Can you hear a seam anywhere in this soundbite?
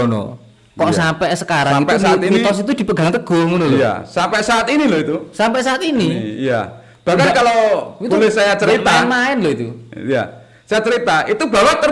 no; 0 cuts

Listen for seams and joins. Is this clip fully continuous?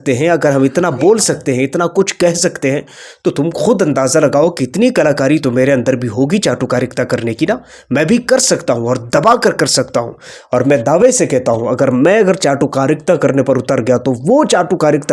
yes; 0 cuts

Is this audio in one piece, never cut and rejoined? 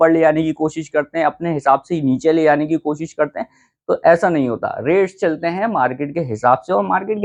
yes; 0 cuts

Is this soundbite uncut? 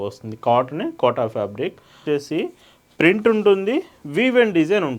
no; 1 cut; at 2.0 s

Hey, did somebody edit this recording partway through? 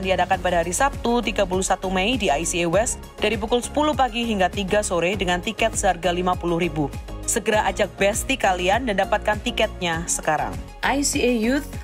yes; 1 cut; at 10.7 s

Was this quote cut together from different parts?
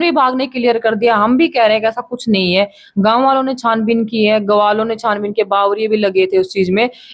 no; 0 cuts

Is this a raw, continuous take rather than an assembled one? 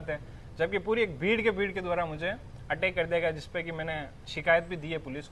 yes; 0 cuts

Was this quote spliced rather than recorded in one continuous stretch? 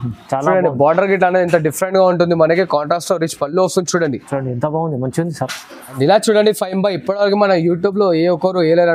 yes; 1 cut; at 5.9 s

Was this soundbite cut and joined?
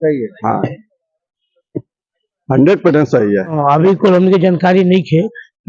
yes; 1 cut; at 3.6 s

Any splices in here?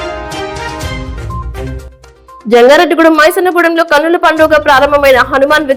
no; 0 cuts

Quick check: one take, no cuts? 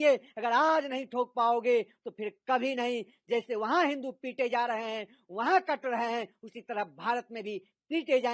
yes; 0 cuts

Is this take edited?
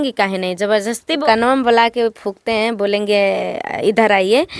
yes; 1 cut; at 1.2 s

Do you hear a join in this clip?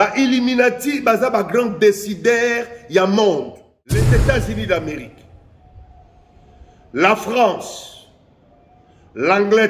yes; 1 cut; at 4.0 s

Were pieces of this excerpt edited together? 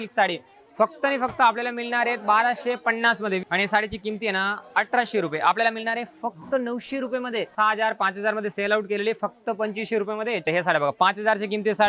yes; 3 cuts; at 3.4 s, 7.5 s, 10.5 s

